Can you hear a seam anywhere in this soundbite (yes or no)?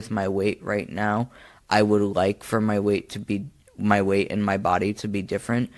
no